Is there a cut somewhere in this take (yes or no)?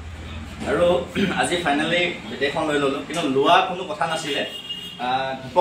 no